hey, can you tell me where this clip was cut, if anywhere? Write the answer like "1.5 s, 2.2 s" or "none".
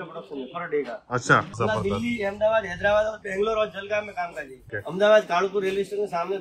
1.5 s, 4.7 s